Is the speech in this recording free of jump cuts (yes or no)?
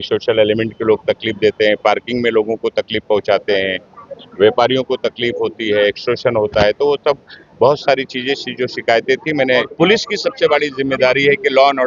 no